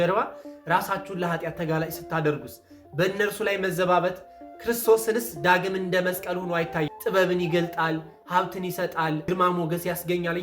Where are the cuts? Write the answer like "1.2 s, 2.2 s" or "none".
6.9 s